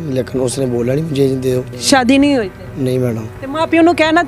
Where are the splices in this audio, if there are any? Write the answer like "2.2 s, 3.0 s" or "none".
1.7 s